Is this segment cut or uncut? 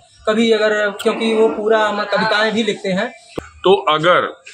cut